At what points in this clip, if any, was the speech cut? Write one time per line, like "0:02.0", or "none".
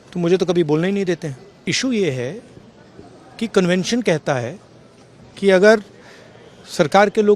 0:01.7